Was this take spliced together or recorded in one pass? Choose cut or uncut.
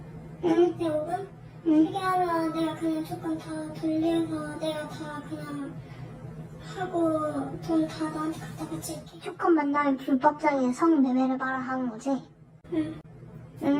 uncut